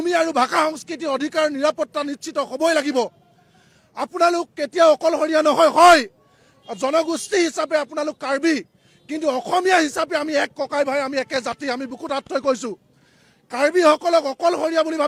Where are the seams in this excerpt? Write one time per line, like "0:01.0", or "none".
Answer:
none